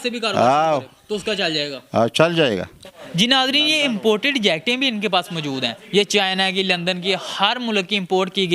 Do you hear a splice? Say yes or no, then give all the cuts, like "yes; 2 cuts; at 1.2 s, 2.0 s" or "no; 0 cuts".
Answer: yes; 1 cut; at 3.0 s